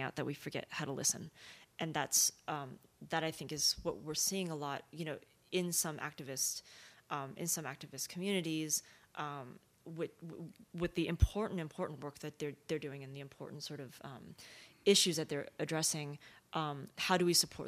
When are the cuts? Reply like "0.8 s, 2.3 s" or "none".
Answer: none